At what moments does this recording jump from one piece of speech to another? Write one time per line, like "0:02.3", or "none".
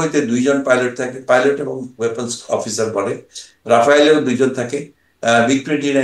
none